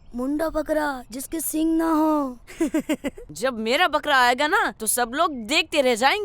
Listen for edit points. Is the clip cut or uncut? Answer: cut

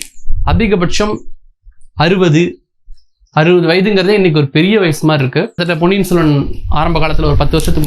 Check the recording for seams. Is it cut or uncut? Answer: cut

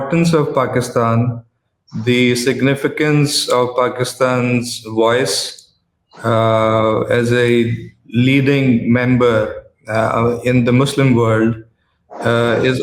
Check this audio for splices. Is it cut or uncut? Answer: uncut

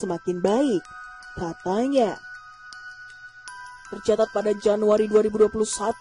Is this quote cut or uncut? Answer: cut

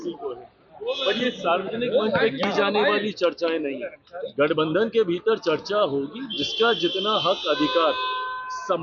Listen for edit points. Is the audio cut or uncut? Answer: uncut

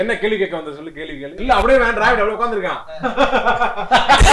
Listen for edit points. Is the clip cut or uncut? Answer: cut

